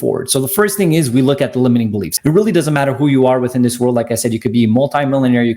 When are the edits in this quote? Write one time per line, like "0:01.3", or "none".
0:02.1